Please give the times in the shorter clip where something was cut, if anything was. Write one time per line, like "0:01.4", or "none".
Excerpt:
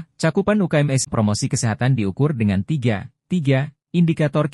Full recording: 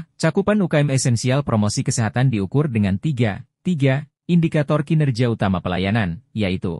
0:01.1